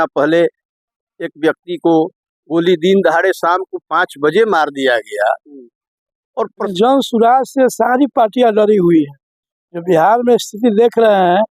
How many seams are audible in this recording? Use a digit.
1